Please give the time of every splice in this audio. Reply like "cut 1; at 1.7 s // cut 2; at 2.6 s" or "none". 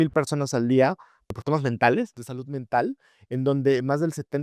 cut 1; at 1.3 s